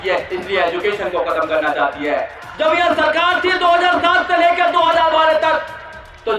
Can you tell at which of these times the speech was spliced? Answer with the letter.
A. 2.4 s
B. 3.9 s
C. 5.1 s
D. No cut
A